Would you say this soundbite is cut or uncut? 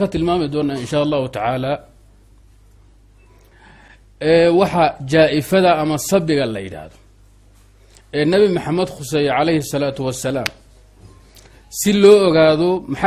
uncut